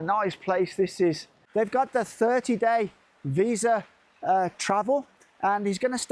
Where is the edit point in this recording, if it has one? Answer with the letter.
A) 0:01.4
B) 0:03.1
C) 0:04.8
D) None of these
A